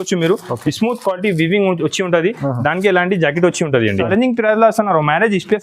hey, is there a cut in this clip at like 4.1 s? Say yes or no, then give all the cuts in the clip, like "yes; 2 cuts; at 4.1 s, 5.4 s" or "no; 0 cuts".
yes; 1 cut; at 4.1 s